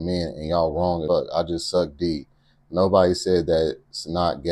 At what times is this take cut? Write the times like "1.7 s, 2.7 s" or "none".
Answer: 1.0 s